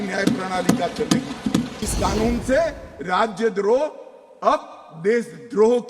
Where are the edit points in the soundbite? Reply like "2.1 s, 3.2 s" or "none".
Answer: 1.8 s